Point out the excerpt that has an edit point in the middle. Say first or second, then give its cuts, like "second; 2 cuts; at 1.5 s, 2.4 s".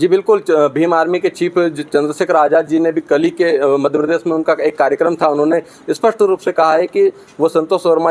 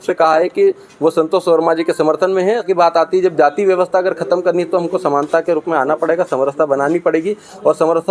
second; 1 cut; at 2.7 s